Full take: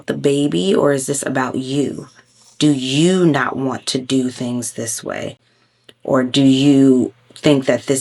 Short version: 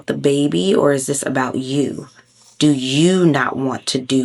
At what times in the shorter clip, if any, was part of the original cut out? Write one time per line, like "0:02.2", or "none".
none